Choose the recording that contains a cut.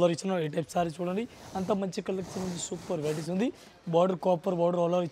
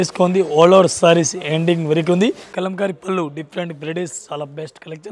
second; 1 cut; at 2.5 s

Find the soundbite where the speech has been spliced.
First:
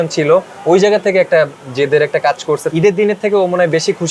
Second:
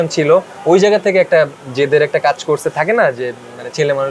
first; 1 cut; at 2.7 s

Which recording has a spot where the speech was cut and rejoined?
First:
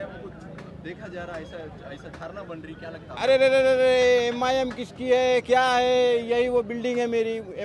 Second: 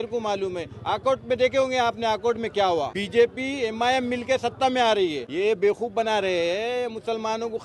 second; 2 cuts; at 3.0 s, 5.2 s

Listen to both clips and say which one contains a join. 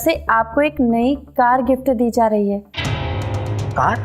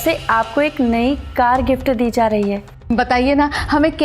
second; 1 cut; at 2.7 s

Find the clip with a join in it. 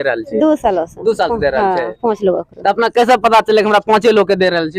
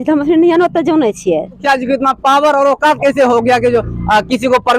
second; 1 cut; at 1.6 s

